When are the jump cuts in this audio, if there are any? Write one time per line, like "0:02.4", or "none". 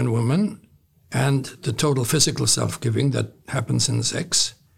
none